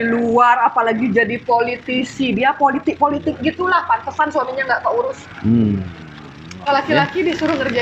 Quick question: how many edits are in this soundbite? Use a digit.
1